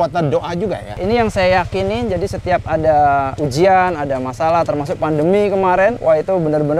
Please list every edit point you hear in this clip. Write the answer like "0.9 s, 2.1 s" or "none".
1.0 s, 3.3 s, 6.0 s